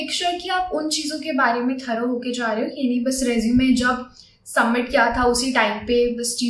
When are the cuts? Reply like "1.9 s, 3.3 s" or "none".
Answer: none